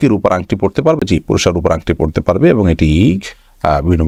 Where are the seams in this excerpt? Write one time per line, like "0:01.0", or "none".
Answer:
none